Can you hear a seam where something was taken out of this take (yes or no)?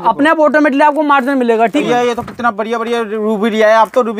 yes